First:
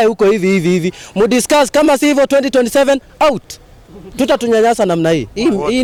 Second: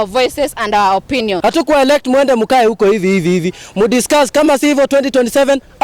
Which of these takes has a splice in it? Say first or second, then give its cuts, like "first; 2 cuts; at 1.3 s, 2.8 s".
second; 1 cut; at 1.4 s